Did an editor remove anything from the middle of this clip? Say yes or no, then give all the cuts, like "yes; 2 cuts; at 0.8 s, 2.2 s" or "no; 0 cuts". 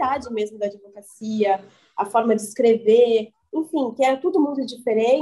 no; 0 cuts